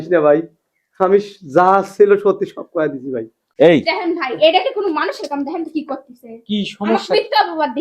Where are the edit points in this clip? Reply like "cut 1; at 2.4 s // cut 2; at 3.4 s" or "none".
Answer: cut 1; at 3.4 s